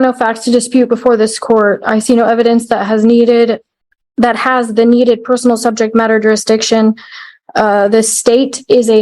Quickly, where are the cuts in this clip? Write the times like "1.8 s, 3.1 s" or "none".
none